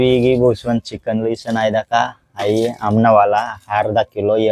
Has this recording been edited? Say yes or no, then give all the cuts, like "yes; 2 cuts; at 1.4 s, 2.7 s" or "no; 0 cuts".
no; 0 cuts